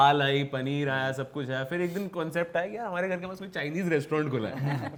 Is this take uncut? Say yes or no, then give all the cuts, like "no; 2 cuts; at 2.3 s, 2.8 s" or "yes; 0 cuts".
yes; 0 cuts